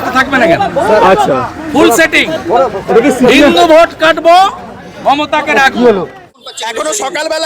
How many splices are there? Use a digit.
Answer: 1